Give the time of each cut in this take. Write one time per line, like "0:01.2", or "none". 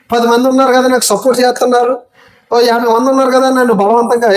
none

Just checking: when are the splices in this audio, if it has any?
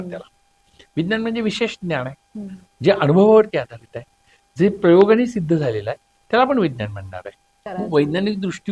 0:07.6

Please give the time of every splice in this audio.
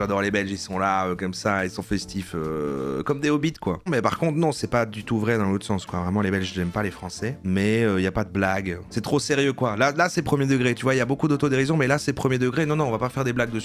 0:03.9

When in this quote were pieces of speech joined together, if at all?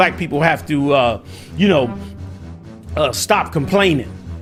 none

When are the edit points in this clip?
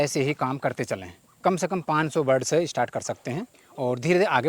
0:03.6

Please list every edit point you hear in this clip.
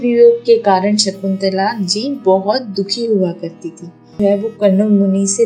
0:04.2

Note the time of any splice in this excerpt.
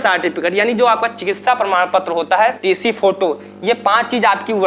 0:02.6

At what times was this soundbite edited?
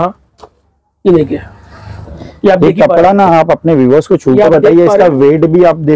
none

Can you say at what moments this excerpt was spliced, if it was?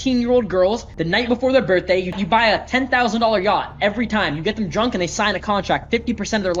0:00.9
0:02.2

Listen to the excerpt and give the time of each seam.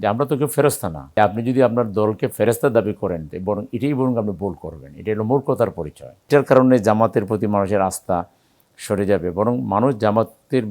0:01.0
0:06.3

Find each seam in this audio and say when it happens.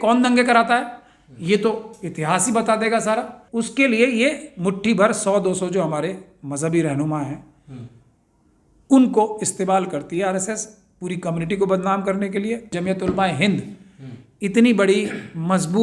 0:03.4
0:12.7

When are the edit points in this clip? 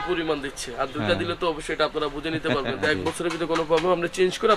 0:02.8

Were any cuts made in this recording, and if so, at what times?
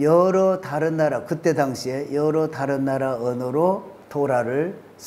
0:04.0

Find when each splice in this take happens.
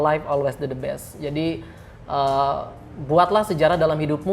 none

